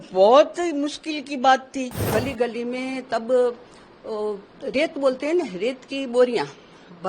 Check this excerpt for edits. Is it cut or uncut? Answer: cut